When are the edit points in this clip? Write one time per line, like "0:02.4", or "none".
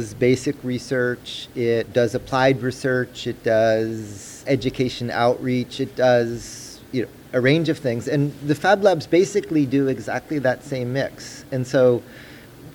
0:01.9
0:04.4